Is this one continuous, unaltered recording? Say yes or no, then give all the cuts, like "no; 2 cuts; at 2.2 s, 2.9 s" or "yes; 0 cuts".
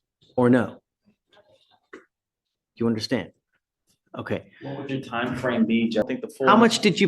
no; 1 cut; at 6.0 s